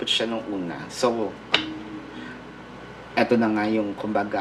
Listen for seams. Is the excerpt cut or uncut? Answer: uncut